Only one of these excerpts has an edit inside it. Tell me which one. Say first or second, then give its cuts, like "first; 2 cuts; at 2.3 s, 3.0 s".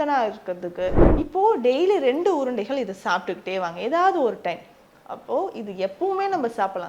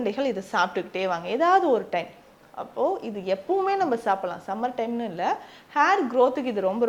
first; 1 cut; at 1.0 s